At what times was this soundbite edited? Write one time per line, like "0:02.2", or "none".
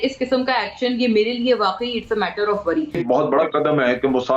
0:03.0